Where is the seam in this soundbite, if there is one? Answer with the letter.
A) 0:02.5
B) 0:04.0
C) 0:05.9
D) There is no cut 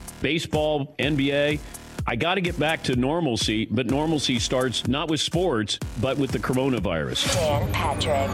D